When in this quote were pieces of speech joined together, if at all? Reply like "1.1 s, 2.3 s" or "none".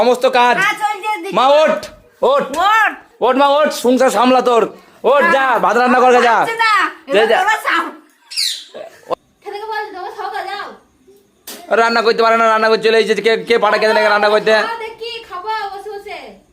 9.0 s